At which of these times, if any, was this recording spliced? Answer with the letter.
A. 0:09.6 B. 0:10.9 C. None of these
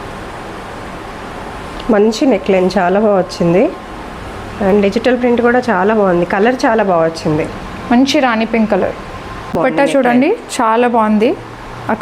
A